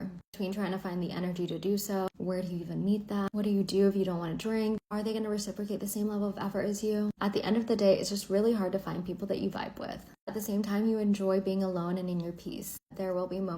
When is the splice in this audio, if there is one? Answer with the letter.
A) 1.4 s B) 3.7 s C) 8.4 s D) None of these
A